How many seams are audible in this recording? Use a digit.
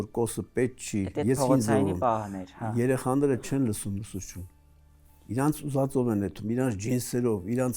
0